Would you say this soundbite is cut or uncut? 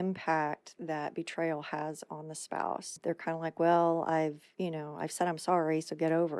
cut